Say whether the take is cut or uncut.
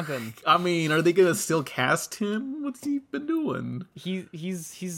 uncut